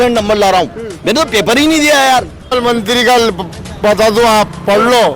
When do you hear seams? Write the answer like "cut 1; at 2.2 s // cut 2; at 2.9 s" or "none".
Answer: cut 1; at 2.5 s